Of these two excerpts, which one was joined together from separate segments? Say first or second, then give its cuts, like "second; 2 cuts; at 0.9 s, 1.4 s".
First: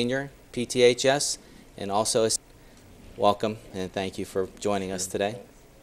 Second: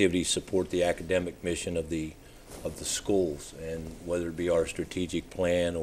first; 1 cut; at 2.4 s